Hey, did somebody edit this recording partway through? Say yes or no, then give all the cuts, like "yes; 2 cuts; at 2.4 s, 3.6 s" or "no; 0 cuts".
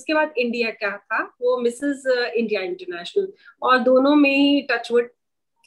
no; 0 cuts